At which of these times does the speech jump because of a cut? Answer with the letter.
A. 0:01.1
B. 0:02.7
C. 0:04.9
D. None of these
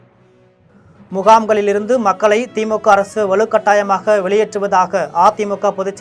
A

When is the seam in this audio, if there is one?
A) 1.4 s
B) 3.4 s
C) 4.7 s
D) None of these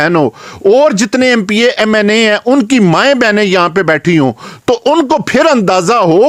D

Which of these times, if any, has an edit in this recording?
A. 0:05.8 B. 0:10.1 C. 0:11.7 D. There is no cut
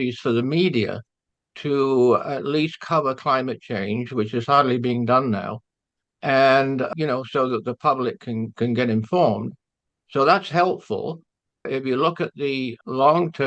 C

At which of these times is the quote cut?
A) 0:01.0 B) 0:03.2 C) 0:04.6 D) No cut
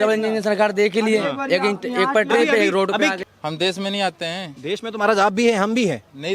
B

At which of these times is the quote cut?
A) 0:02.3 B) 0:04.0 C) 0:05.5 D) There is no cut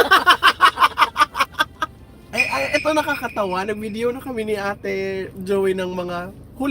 A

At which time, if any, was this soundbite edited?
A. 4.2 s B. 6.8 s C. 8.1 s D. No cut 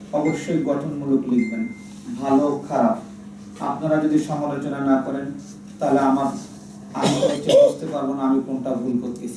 D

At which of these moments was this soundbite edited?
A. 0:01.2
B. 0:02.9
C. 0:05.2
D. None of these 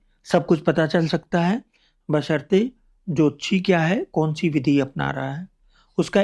D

